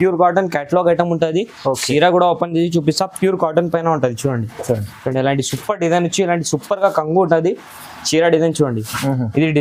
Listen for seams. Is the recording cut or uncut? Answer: uncut